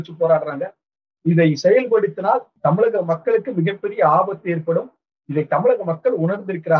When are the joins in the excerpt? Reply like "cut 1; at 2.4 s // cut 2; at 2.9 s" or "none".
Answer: none